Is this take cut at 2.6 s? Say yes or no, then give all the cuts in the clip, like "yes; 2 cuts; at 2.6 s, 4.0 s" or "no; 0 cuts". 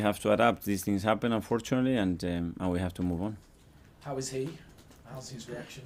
no; 0 cuts